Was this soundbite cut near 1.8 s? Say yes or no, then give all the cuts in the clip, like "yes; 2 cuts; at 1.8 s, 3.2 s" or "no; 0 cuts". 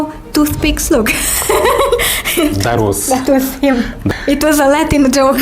no; 1 cut; at 4.1 s